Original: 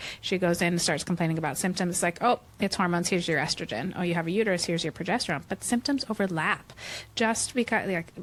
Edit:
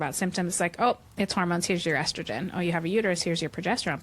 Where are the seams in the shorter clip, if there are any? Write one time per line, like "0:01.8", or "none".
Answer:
none

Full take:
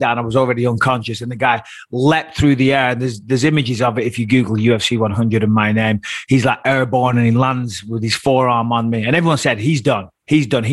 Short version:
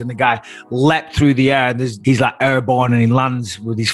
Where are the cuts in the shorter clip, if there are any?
0:01.9

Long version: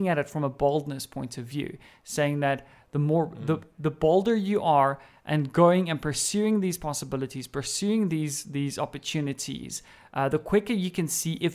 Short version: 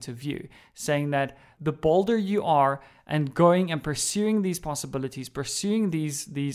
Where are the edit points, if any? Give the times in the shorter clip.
0:01.5

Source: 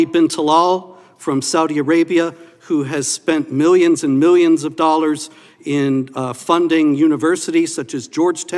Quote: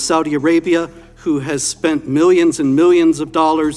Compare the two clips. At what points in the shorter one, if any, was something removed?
none

